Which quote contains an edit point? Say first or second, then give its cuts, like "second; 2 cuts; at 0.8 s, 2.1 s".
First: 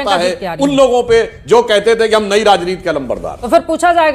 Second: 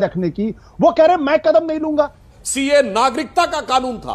second; 1 cut; at 2.3 s